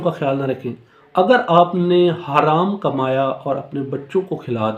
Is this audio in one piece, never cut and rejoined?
yes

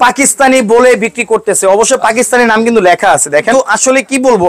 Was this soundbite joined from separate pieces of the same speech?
yes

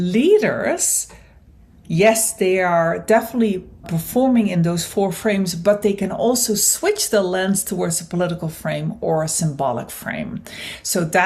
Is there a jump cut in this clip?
yes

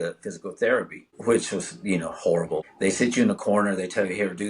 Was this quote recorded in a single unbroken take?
no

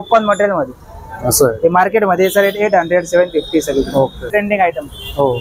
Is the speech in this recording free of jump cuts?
yes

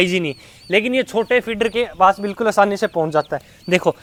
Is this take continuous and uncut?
yes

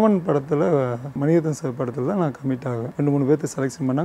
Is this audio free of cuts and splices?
no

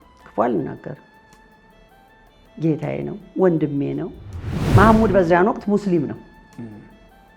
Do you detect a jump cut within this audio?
yes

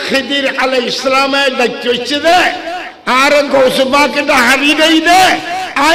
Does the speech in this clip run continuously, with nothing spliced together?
yes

